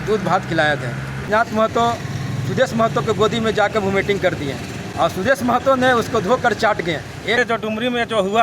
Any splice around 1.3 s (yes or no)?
yes